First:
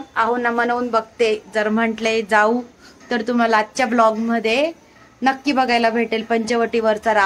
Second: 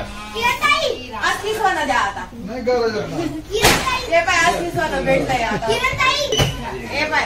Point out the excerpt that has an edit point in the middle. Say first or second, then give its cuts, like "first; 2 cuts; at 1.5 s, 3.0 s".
second; 1 cut; at 6.3 s